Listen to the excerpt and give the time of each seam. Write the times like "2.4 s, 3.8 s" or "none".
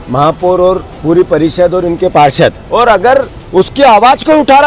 2.6 s